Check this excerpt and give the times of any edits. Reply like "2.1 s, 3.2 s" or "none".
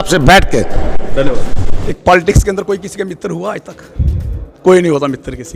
1.5 s